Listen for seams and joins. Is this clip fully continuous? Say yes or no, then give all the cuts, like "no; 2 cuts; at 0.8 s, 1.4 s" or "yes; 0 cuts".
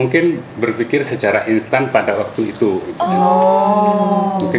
yes; 0 cuts